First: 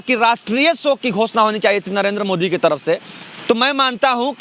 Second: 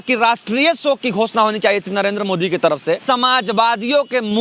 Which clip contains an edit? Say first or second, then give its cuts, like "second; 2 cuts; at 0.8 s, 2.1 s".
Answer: second; 1 cut; at 3.0 s